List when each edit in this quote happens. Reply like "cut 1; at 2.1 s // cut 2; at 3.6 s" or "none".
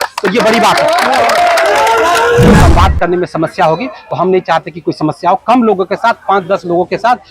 cut 1; at 2.6 s